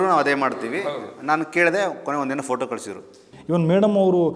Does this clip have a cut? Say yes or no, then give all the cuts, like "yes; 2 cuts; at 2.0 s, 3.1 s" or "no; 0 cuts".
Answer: yes; 1 cut; at 3.3 s